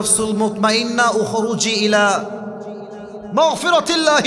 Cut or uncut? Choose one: uncut